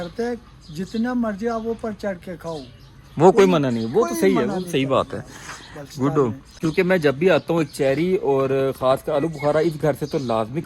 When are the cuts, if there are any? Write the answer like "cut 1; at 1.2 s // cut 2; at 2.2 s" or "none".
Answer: none